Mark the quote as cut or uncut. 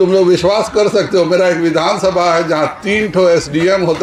uncut